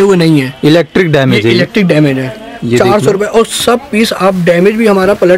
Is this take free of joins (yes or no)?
yes